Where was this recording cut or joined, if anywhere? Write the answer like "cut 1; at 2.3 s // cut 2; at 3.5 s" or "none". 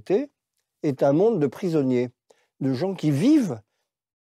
none